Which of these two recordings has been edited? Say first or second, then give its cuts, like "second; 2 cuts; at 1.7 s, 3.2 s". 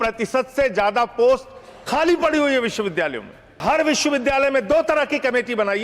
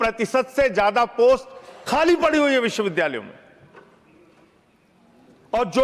first; 1 cut; at 3.6 s